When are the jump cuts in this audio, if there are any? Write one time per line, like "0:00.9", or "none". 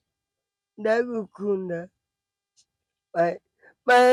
none

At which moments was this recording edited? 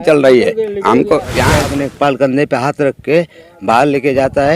0:01.5

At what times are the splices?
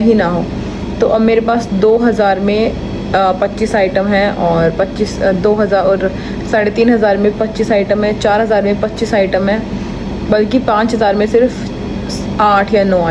none

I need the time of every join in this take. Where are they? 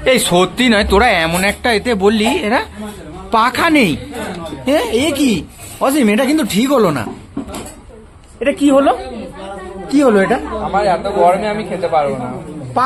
none

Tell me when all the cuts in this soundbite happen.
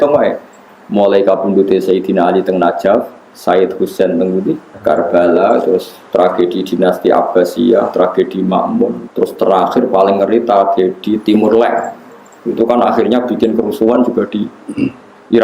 0:04.7
0:09.0

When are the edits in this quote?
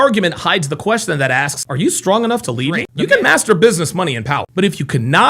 0:02.9

